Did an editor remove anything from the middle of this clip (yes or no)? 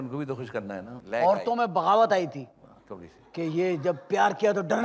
yes